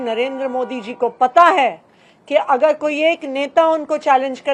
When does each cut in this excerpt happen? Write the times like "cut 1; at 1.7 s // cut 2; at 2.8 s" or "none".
none